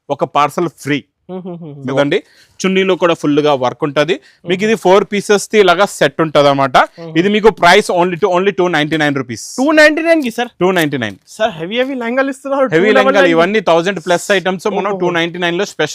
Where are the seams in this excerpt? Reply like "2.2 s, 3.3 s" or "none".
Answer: 1.9 s